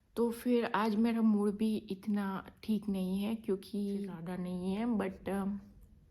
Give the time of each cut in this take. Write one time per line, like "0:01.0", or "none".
0:04.2

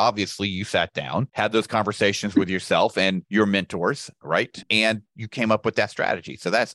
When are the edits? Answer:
0:03.2

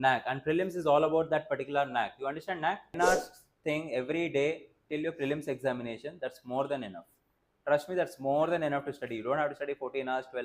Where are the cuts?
0:02.9

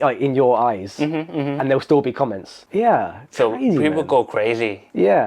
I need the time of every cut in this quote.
0:02.6

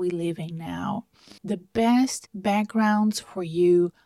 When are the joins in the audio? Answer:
none

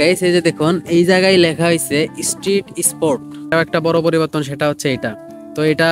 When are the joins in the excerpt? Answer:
0:03.5

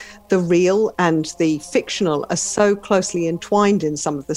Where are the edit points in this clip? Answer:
0:00.9

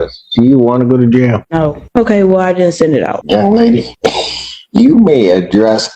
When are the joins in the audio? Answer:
0:01.7
0:03.2
0:03.9

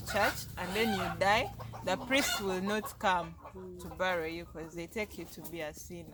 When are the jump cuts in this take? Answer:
none

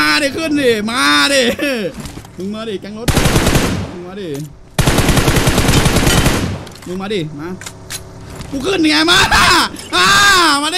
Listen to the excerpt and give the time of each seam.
none

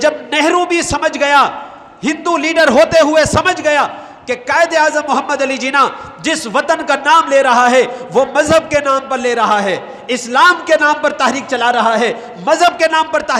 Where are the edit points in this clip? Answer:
none

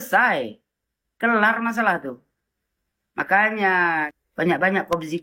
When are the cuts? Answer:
0:04.1

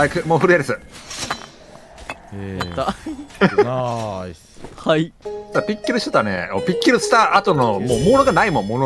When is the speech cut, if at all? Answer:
none

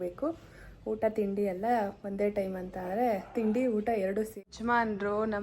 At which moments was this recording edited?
0:04.3

